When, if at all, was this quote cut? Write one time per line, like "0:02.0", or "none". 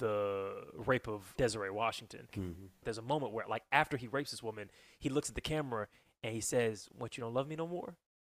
0:01.3
0:02.6